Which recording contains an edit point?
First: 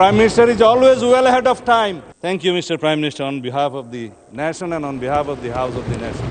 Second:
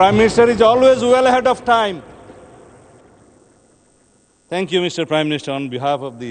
first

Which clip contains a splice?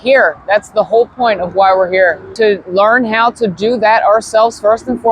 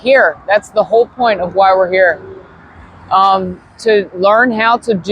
first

